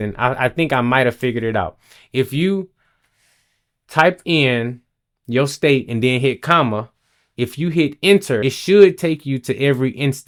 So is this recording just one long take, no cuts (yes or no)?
yes